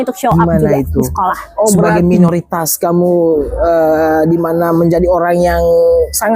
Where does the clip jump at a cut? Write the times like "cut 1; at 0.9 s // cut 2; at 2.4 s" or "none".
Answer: cut 1; at 1.9 s